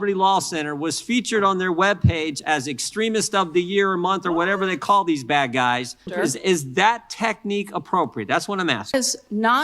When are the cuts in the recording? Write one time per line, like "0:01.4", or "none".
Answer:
0:06.1
0:08.9